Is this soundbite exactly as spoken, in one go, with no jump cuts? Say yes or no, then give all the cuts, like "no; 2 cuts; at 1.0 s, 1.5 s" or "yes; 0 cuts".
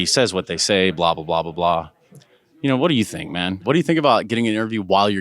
no; 1 cut; at 3.6 s